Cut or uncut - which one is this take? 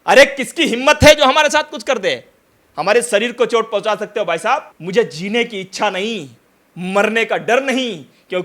cut